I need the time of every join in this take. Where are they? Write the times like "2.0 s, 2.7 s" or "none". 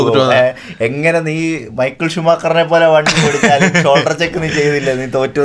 none